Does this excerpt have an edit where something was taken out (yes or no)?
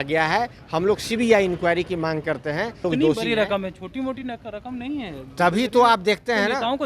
yes